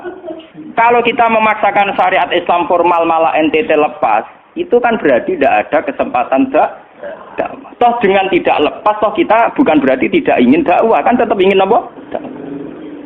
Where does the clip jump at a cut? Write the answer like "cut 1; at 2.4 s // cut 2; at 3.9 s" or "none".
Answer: cut 1; at 12.0 s